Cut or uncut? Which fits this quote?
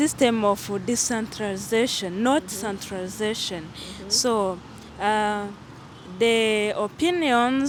uncut